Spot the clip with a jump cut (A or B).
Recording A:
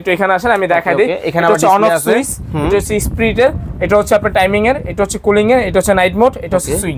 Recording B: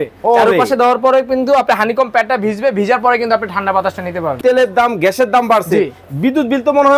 B